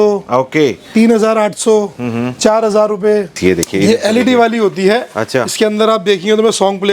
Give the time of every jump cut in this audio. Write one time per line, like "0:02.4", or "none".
0:03.4